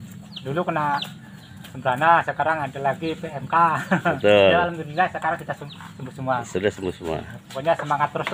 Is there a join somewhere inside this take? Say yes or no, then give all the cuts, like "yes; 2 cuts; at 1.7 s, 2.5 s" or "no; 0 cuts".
no; 0 cuts